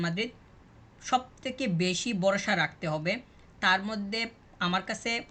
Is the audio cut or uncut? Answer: uncut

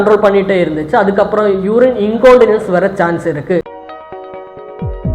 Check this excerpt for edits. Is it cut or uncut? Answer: cut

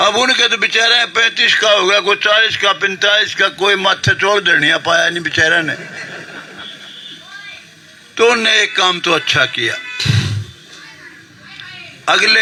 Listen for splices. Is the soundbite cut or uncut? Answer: uncut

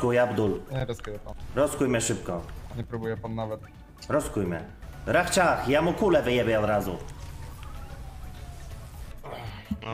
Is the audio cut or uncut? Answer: uncut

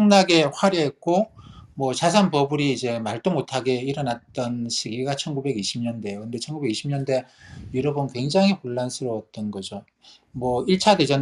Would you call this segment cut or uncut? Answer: uncut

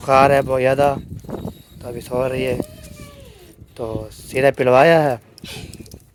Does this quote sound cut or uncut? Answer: uncut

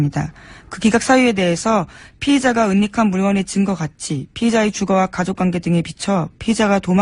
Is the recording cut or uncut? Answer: cut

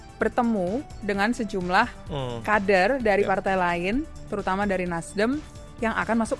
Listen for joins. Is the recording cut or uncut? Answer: uncut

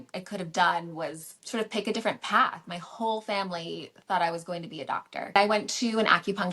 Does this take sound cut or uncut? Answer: cut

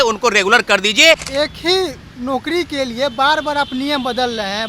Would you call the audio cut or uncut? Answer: cut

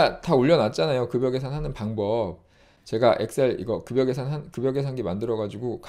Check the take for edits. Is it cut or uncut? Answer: uncut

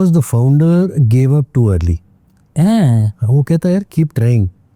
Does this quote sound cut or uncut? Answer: uncut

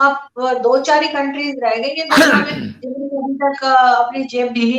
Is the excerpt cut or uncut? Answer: uncut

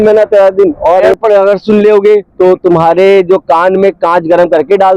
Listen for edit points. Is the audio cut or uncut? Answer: cut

